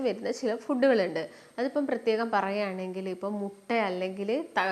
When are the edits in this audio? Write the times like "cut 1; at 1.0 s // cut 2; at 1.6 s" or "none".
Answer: none